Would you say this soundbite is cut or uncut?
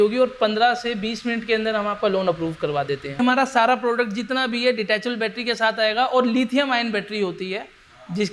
cut